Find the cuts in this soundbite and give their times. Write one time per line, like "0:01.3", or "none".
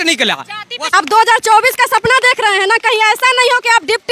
0:00.9